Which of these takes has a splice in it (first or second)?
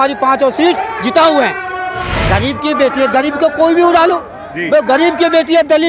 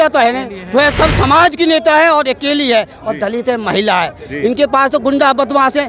first